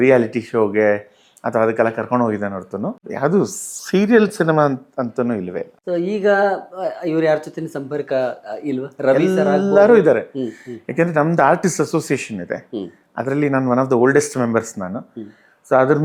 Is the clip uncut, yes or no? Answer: yes